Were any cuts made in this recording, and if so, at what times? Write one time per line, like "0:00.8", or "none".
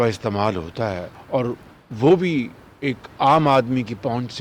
0:01.1